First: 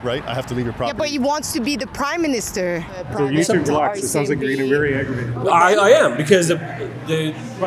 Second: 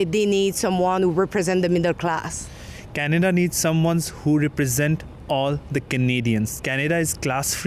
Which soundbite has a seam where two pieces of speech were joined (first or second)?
first